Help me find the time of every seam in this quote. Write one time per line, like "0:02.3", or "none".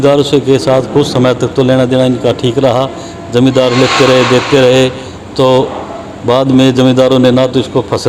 none